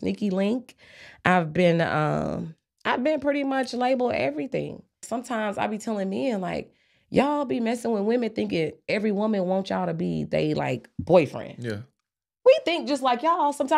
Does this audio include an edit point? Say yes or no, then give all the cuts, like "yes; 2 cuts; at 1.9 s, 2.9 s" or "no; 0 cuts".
yes; 1 cut; at 5.0 s